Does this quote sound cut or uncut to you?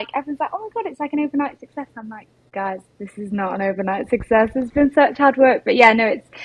uncut